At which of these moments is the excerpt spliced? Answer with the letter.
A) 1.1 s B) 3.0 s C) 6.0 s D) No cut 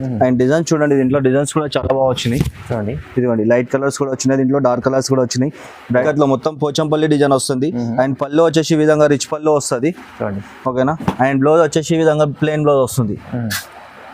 C